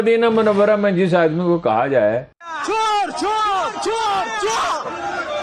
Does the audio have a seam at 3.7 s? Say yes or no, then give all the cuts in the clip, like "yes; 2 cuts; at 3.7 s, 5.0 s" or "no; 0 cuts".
no; 1 cut; at 2.3 s